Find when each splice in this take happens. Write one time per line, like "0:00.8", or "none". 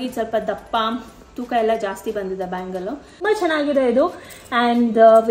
0:03.2